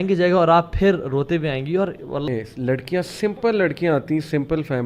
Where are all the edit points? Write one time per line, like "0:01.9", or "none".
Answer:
0:02.3